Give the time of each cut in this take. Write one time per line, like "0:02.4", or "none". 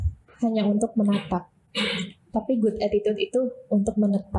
none